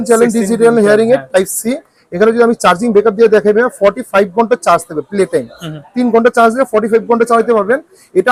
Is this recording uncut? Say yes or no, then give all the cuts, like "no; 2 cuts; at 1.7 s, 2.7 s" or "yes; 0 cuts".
yes; 0 cuts